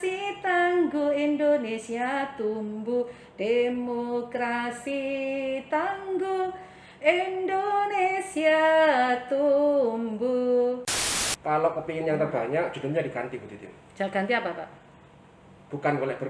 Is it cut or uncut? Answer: cut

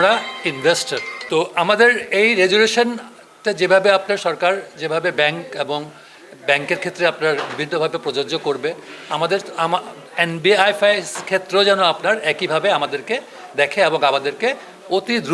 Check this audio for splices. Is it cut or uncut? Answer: uncut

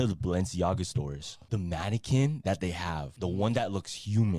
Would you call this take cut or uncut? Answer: uncut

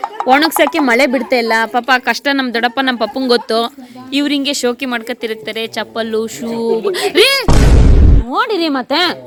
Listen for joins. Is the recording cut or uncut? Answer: uncut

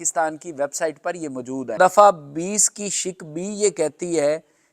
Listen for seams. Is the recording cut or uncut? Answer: cut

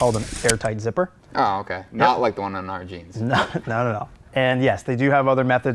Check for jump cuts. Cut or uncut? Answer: cut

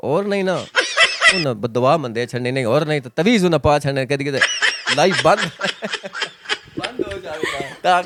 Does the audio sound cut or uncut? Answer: uncut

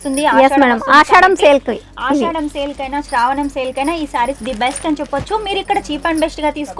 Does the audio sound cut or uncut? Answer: uncut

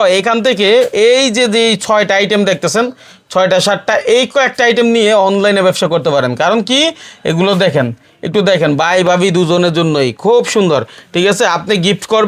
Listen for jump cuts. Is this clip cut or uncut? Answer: uncut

